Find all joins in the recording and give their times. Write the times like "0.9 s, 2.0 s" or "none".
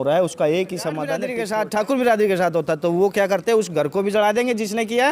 1.2 s